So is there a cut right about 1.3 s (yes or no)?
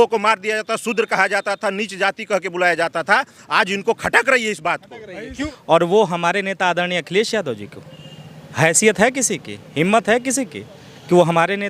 no